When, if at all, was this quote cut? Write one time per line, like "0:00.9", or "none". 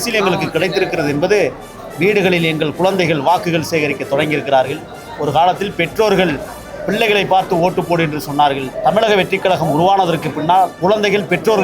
0:08.7
0:10.7